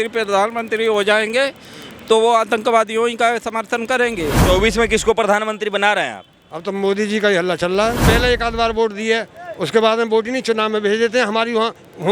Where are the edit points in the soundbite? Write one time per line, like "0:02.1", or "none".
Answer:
0:04.4
0:08.0